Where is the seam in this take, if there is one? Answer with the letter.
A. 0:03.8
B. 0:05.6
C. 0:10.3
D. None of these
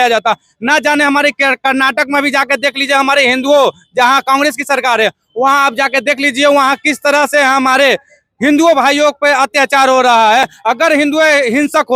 D